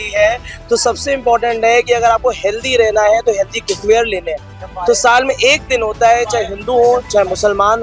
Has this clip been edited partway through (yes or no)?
no